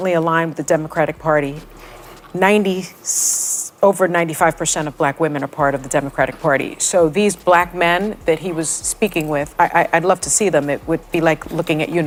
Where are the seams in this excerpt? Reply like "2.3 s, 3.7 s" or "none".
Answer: none